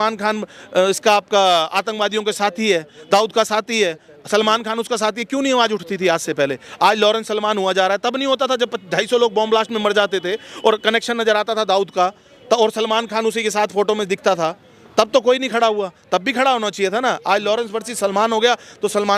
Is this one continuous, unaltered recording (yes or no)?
yes